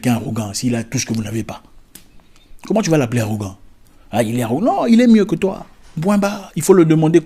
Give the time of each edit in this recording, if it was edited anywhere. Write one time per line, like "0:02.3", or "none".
none